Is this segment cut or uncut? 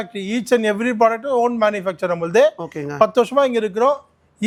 uncut